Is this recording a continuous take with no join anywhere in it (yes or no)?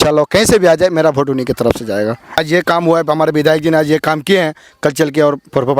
no